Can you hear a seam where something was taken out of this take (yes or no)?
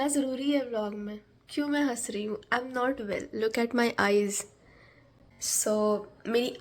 no